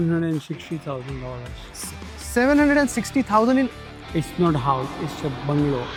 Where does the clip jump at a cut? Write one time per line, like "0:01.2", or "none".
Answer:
none